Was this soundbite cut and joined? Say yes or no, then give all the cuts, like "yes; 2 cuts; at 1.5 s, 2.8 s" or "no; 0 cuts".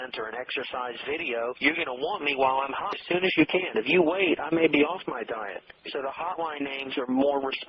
yes; 1 cut; at 3.0 s